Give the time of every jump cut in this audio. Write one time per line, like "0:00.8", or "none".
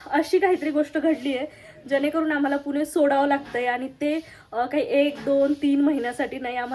none